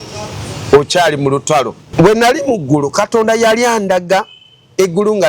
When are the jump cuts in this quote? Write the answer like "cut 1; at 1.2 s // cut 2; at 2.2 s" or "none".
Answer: cut 1; at 1.8 s